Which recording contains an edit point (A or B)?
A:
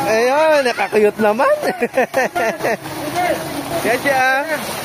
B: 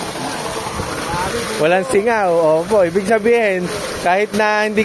A